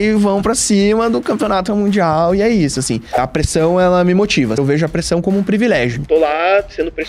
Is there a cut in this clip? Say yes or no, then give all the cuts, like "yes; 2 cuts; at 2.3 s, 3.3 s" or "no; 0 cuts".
yes; 3 cuts; at 3.2 s, 4.6 s, 6.0 s